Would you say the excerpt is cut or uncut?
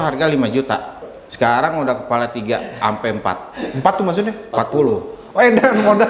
cut